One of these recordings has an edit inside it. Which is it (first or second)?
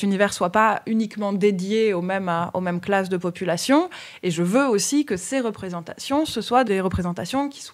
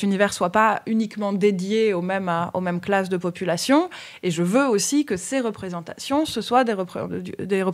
first